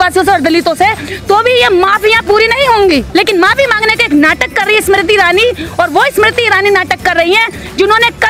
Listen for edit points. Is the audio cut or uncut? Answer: uncut